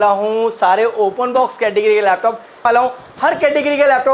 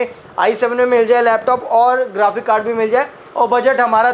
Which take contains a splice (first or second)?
first